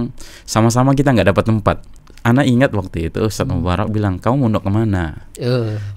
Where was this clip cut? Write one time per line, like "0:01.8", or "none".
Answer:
0:01.9